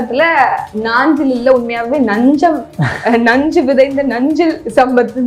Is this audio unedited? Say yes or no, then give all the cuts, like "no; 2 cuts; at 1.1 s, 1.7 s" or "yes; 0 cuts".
yes; 0 cuts